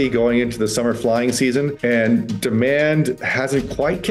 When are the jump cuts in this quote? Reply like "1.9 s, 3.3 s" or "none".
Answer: 1.7 s